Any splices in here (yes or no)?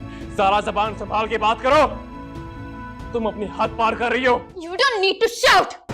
yes